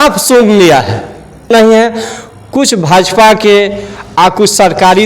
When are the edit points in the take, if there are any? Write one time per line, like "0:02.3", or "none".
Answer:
0:01.5